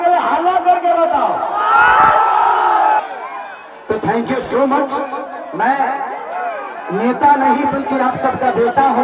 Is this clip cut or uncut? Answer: cut